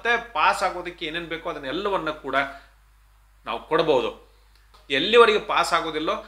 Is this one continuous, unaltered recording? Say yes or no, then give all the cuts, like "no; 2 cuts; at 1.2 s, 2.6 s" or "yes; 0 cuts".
no; 1 cut; at 4.7 s